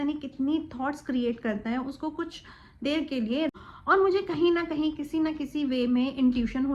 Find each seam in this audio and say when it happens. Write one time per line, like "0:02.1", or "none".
0:03.5